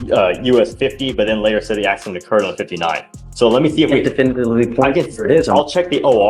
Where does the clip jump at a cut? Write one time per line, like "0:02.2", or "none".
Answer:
none